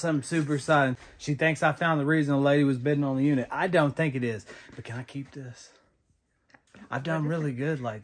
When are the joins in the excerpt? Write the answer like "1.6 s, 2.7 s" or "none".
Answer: 0.9 s